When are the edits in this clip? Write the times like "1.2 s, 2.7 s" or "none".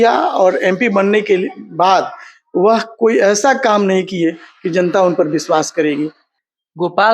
6.2 s